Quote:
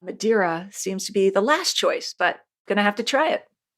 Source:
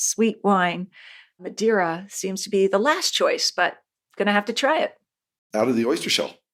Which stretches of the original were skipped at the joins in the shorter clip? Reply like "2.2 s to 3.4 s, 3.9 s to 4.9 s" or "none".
3.9 s to 4.0 s